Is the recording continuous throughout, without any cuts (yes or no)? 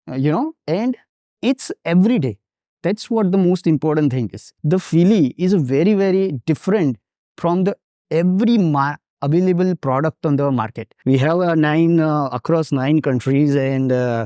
no